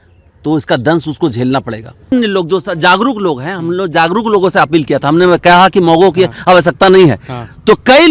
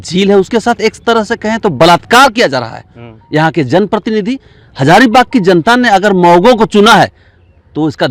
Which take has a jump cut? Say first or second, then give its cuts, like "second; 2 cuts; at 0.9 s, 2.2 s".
first; 1 cut; at 2.1 s